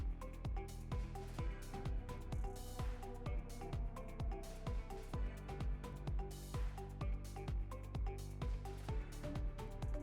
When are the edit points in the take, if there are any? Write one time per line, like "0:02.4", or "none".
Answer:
none